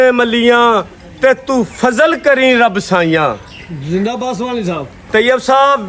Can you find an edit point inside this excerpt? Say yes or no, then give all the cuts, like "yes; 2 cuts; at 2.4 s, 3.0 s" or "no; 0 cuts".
no; 0 cuts